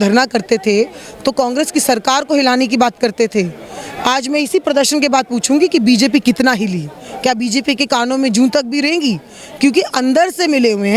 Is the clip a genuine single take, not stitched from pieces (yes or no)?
yes